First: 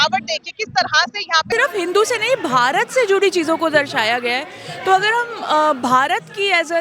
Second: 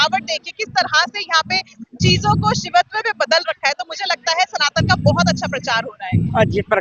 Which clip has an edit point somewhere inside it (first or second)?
first